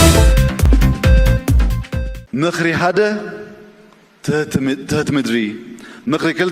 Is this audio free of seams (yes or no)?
no